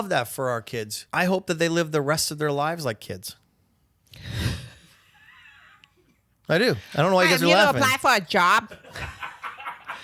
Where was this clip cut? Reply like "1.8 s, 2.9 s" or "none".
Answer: 1.0 s